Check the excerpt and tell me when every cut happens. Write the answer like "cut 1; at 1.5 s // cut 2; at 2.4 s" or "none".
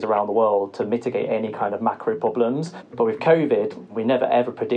cut 1; at 2.8 s // cut 2; at 3.9 s